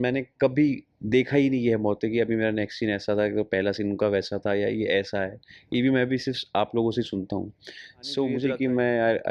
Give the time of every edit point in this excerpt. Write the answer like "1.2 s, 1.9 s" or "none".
8.4 s